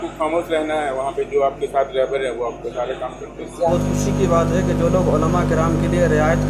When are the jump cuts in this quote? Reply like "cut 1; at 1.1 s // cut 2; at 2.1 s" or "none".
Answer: cut 1; at 3.7 s